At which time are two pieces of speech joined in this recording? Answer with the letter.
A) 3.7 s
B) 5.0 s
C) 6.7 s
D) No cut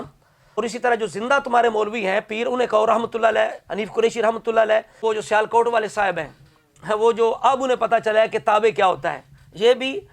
B